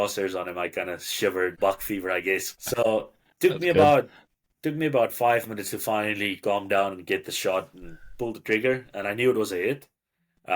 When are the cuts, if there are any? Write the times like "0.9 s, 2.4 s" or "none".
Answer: 1.5 s, 2.6 s